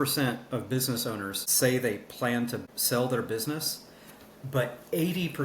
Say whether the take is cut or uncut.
cut